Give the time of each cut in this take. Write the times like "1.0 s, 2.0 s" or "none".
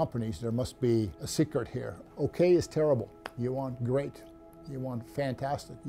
2.0 s, 3.2 s